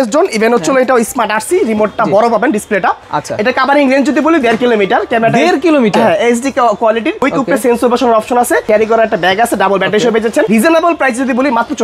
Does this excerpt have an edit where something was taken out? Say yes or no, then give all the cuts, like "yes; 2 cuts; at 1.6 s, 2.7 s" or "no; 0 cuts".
yes; 3 cuts; at 7.2 s, 8.6 s, 10.5 s